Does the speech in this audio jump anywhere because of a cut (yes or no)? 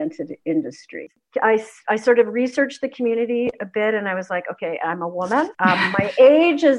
yes